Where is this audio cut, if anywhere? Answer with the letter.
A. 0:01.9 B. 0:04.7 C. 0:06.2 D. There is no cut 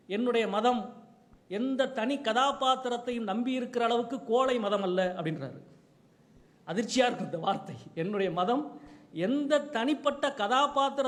D